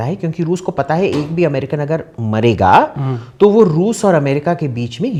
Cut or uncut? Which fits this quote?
uncut